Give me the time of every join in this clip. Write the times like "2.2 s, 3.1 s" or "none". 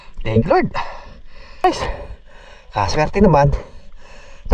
1.6 s